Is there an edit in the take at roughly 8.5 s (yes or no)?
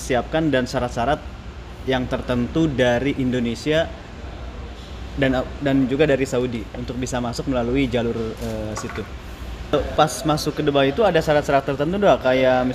no